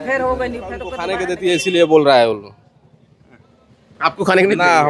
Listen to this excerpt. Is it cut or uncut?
cut